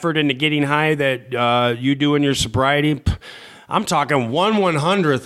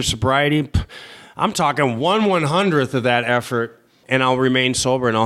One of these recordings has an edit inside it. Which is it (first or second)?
second